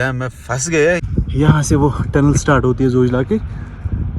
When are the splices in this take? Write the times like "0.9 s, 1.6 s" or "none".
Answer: 1.1 s